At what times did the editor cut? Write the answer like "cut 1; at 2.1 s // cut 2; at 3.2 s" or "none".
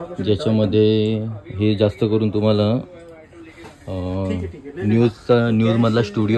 none